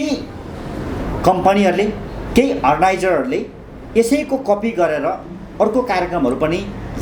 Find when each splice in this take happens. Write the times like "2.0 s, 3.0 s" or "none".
none